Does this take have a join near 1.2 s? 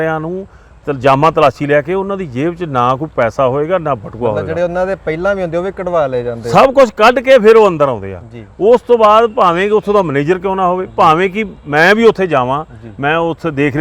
no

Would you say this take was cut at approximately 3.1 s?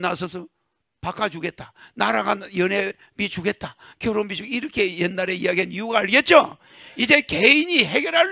no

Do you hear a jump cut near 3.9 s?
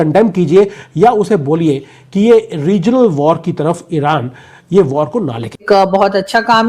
no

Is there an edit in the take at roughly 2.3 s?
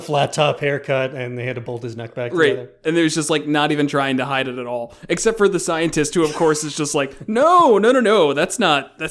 yes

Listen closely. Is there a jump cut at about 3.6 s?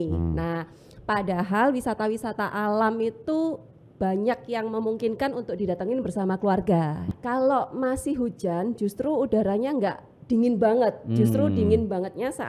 no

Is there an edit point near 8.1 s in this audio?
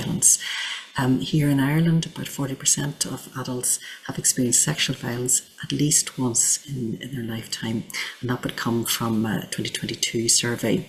no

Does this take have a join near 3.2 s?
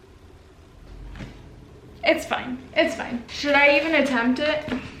yes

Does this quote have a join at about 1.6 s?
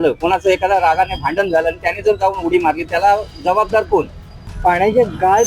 no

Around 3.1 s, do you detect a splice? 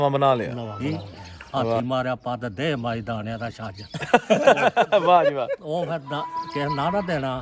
no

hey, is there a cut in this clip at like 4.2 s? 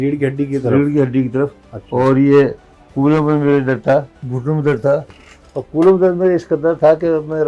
yes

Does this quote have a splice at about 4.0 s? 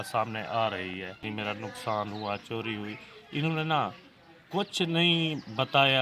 no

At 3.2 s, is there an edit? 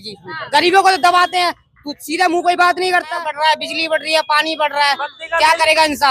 yes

